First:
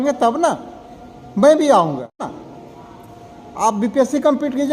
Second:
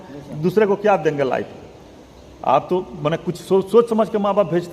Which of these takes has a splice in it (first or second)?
first